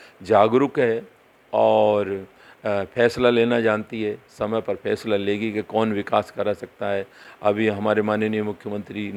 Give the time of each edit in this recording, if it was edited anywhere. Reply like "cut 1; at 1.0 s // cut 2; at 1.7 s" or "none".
none

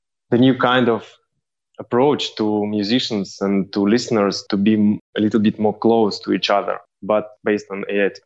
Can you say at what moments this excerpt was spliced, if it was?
cut 1; at 7.3 s

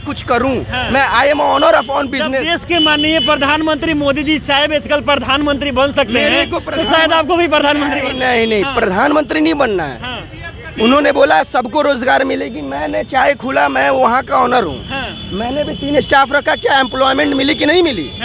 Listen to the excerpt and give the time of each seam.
none

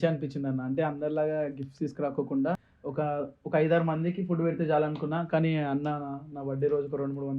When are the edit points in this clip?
cut 1; at 2.8 s

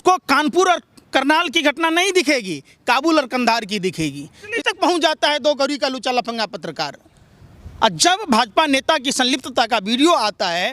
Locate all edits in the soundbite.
cut 1; at 4.5 s

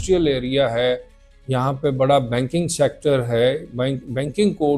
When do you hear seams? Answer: none

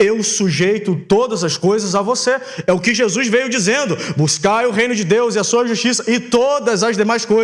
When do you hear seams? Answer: none

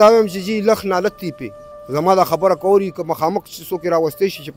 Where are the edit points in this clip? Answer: cut 1; at 1.8 s

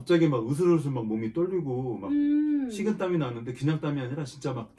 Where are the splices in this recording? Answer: none

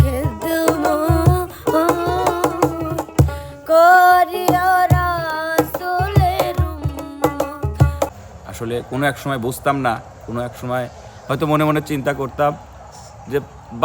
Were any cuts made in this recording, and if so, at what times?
cut 1; at 8.1 s

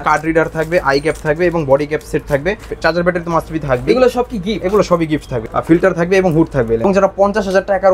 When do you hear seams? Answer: cut 1; at 2.7 s // cut 2; at 5.4 s // cut 3; at 6.8 s

